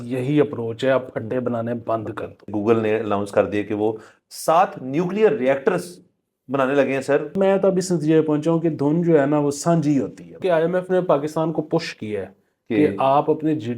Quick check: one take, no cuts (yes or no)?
no